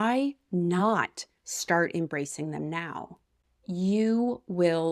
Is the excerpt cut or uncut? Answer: cut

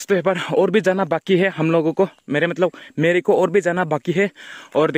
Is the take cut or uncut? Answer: uncut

